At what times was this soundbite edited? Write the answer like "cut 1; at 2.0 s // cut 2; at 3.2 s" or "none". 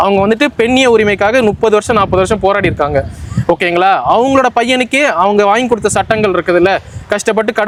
none